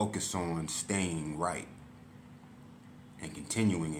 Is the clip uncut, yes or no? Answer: yes